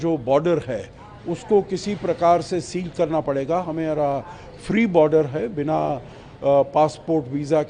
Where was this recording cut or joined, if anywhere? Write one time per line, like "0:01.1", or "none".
none